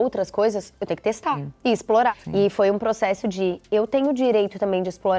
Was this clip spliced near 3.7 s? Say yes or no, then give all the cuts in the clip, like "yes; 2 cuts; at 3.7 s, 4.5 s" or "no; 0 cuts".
no; 2 cuts; at 1.5 s, 2.1 s